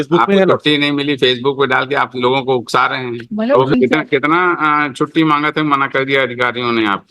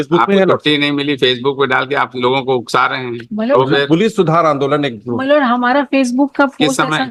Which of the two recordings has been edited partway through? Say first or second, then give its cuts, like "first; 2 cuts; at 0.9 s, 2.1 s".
first; 1 cut; at 3.7 s